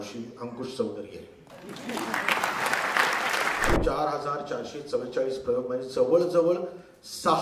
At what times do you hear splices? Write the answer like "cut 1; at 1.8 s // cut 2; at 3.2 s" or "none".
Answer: cut 1; at 3.8 s

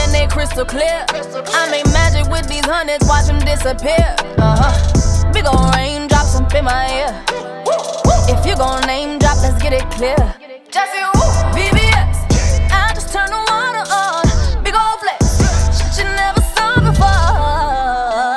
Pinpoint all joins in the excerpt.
none

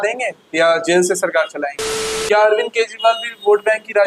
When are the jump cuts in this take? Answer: cut 1; at 2.1 s

